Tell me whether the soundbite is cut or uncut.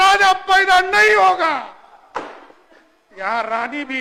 uncut